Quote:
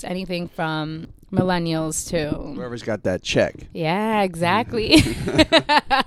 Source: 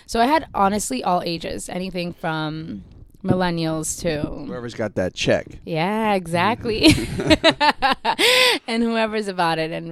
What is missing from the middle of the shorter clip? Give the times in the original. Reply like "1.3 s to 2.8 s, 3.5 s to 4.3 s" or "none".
2.8 s to 3.0 s